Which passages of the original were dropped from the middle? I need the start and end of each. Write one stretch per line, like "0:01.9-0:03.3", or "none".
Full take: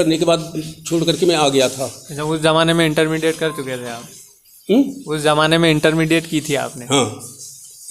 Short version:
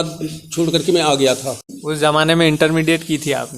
0:02.1-0:05.0